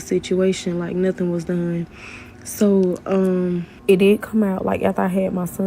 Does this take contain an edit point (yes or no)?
yes